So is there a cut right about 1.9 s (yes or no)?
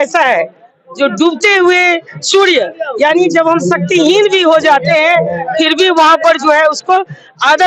no